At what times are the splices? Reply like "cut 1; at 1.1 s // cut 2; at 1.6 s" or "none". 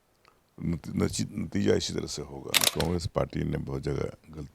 cut 1; at 2.7 s